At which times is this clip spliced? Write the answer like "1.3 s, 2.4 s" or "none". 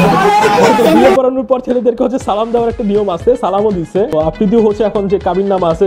none